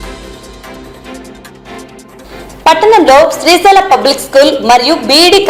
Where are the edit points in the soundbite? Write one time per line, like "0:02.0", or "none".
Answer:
0:02.0